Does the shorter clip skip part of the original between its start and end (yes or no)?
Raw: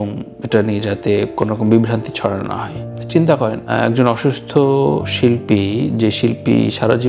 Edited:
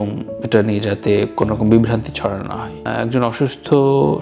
yes